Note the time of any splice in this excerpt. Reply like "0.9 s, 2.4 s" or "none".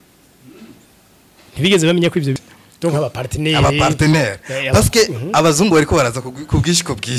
2.3 s